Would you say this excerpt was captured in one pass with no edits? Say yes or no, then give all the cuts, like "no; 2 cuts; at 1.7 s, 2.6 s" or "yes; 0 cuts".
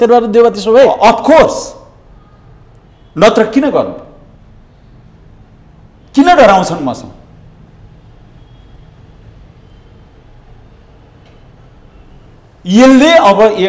yes; 0 cuts